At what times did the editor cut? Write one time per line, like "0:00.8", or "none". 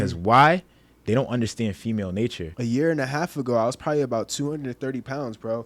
0:02.5